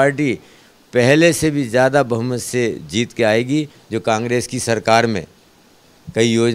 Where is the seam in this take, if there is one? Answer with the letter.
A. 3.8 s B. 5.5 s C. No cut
A